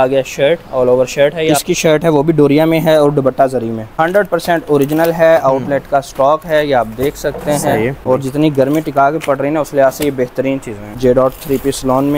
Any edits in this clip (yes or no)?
yes